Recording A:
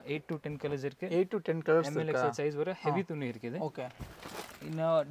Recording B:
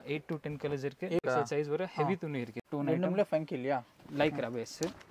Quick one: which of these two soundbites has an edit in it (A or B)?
B